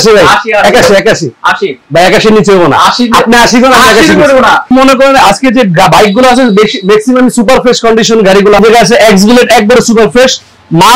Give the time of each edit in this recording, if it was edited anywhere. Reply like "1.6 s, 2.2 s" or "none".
4.7 s, 8.6 s